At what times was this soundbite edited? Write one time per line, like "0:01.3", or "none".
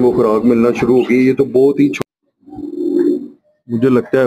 0:01.9